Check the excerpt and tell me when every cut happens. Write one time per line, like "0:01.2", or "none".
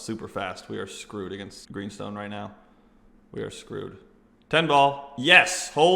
0:01.6